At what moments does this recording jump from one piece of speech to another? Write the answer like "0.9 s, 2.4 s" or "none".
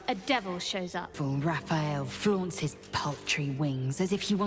1.2 s